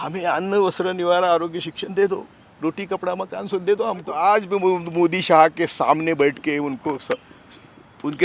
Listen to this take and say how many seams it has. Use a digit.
1